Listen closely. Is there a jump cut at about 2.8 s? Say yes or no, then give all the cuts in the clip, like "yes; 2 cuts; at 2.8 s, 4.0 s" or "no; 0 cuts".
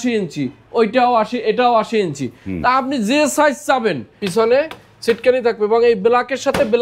no; 1 cut; at 4.1 s